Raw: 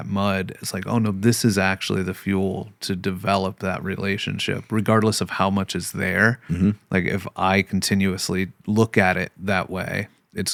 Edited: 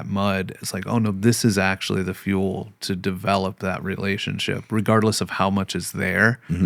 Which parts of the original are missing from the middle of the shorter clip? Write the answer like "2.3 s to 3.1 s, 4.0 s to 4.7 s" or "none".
none

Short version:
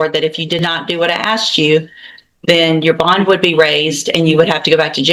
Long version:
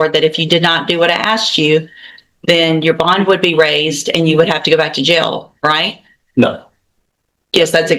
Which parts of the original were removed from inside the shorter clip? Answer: none

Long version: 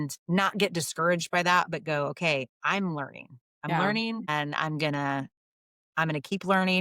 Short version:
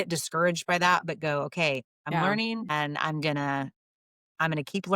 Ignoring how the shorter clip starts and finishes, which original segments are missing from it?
2.5 s to 3.5 s

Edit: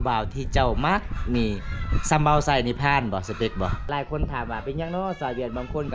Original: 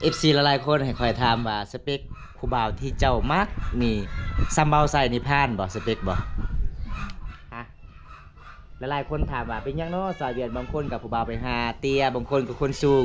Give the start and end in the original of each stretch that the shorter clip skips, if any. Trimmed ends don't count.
6.3 s to 8.9 s

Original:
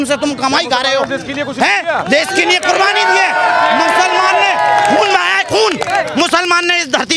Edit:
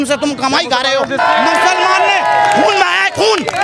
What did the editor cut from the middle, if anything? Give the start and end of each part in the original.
1.2 s to 3.5 s

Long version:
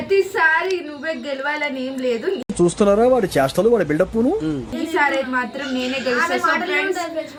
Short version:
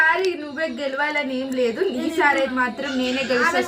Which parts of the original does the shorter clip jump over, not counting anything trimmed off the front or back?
2.4 s to 4.7 s

